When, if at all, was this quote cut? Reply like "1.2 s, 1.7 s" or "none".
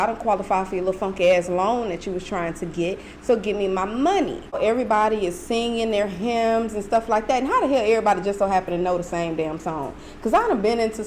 4.6 s